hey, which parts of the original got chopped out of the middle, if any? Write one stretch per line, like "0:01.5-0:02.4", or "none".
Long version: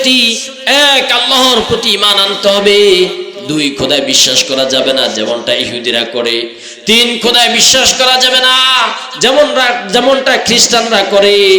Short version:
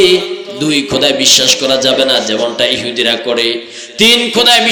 none